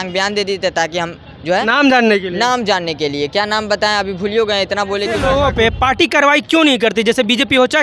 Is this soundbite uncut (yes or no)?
no